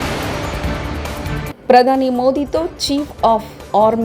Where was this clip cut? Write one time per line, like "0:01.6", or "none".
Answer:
0:01.2